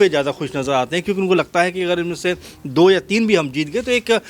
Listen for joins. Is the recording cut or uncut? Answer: uncut